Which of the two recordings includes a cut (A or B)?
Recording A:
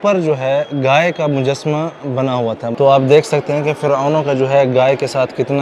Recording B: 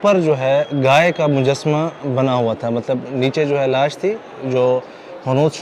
A